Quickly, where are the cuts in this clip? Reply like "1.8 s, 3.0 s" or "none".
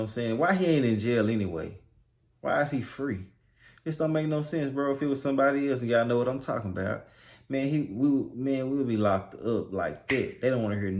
none